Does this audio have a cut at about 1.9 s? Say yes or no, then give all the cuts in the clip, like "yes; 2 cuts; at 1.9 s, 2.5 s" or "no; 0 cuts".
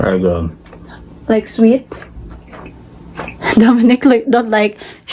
no; 0 cuts